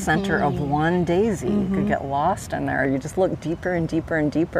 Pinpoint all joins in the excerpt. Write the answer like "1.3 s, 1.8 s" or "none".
2.9 s